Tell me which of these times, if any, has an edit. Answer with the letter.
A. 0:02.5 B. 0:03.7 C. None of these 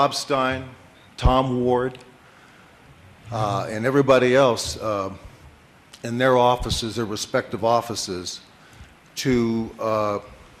B